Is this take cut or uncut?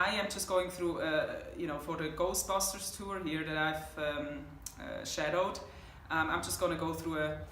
cut